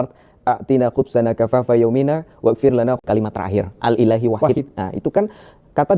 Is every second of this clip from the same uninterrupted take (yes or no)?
no